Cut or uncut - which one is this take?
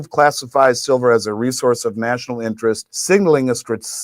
cut